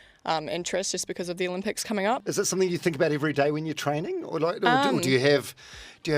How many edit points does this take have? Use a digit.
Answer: 1